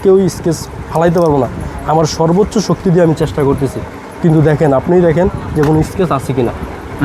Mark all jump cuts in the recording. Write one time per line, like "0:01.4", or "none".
none